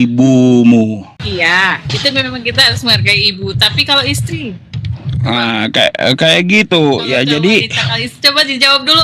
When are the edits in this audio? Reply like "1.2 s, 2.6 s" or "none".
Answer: 1.1 s